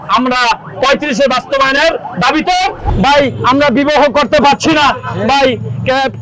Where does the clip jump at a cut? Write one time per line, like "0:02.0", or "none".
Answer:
0:02.9